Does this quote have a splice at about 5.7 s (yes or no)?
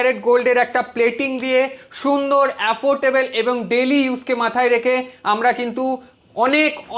no